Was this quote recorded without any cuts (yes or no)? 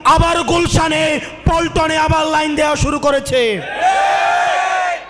yes